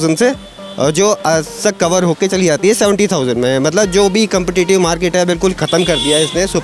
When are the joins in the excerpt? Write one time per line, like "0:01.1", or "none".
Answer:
none